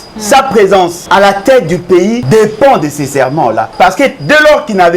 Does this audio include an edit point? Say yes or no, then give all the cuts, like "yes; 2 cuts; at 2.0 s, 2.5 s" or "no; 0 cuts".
yes; 3 cuts; at 1.0 s, 2.2 s, 3.7 s